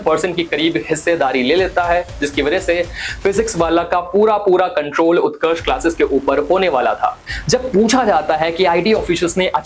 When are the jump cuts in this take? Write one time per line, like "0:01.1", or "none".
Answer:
0:07.3